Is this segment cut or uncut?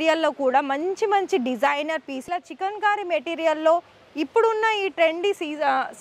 cut